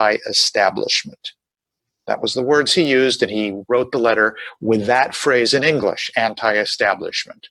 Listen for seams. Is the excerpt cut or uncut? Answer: uncut